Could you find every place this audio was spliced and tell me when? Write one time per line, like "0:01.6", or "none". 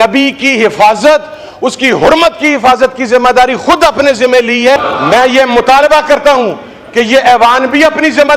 0:04.8